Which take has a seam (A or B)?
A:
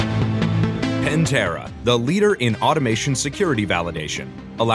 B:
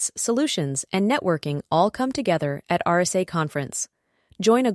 A